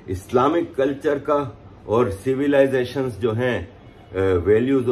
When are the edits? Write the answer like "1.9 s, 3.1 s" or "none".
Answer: none